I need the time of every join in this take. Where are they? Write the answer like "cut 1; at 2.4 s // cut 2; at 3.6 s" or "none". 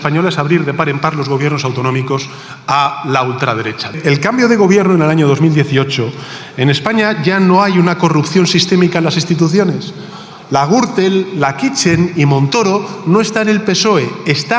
cut 1; at 3.9 s